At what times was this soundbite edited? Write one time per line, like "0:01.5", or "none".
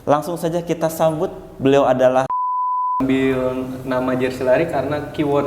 0:02.9